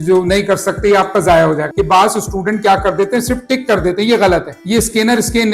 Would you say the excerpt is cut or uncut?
cut